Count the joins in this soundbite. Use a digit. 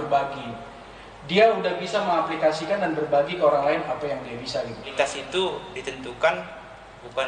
1